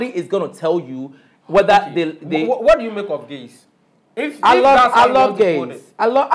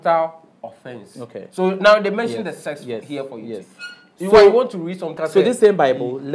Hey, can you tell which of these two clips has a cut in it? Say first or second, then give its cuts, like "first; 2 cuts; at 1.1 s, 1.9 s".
second; 1 cut; at 5.1 s